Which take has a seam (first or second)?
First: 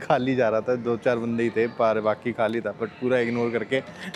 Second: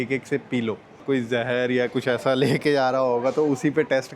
second